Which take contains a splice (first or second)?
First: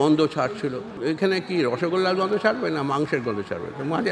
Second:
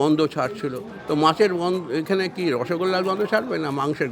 first